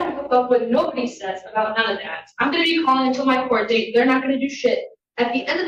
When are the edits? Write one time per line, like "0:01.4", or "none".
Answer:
none